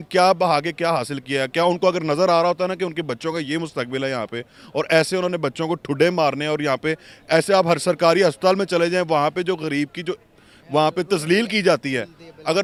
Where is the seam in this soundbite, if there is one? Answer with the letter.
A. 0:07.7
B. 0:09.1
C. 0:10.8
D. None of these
D